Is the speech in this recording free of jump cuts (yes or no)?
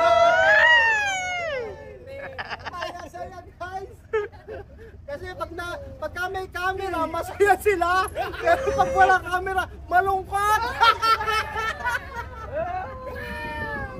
yes